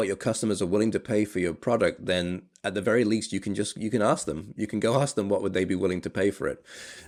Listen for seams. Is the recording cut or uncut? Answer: uncut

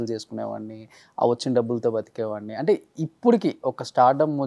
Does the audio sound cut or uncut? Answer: uncut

